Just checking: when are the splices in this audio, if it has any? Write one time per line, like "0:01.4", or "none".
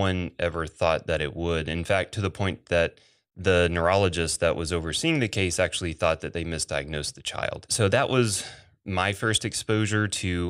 0:07.7